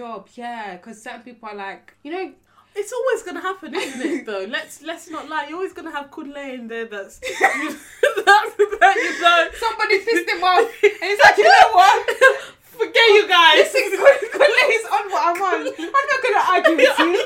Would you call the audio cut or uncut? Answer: cut